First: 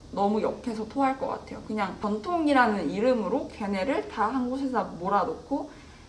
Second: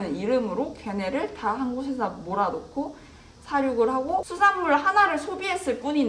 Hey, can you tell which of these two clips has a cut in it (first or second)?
second